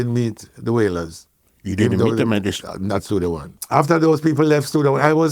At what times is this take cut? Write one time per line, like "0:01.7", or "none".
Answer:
0:03.5